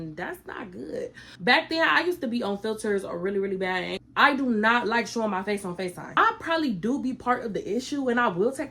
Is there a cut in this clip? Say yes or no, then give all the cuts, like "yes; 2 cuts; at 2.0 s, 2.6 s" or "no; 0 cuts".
yes; 3 cuts; at 1.2 s, 4.0 s, 6.2 s